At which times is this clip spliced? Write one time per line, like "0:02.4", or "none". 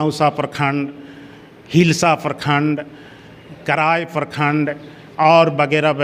none